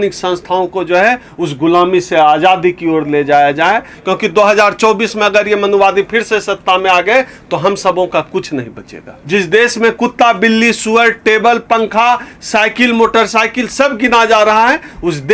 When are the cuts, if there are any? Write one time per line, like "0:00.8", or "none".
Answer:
0:03.9
0:09.2